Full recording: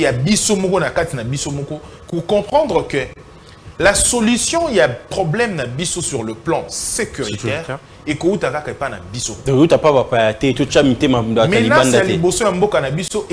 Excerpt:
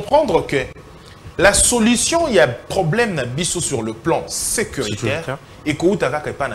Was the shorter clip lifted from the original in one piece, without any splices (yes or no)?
yes